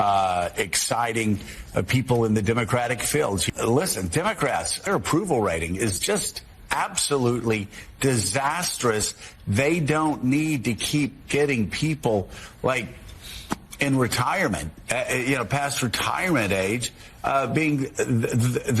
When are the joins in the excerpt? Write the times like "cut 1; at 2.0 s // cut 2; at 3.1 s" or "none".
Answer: cut 1; at 3.5 s // cut 2; at 4.8 s